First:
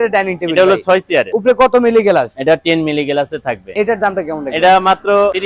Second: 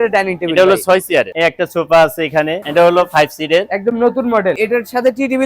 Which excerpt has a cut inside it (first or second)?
second